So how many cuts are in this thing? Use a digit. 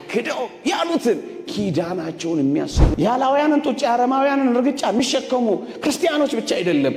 1